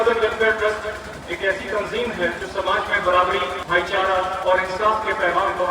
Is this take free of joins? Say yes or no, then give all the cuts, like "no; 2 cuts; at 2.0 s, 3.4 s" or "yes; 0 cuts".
no; 3 cuts; at 2.4 s, 3.6 s, 4.4 s